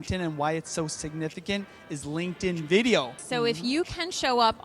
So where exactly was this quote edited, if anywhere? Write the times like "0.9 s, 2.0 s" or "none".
3.2 s